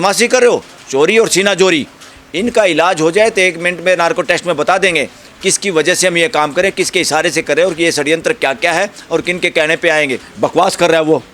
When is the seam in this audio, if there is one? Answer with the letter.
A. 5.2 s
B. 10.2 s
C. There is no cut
B